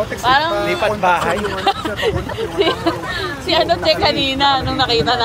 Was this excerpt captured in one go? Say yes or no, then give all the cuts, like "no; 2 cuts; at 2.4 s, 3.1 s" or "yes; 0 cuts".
yes; 0 cuts